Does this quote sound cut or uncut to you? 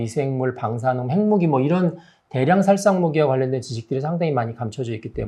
uncut